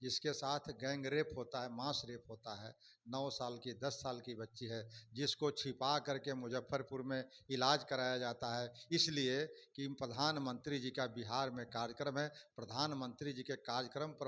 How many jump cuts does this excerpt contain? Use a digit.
0